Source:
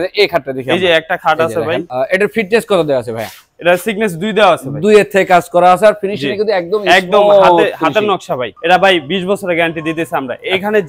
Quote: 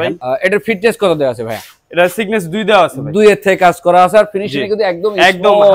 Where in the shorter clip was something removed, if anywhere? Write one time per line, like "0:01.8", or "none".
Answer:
none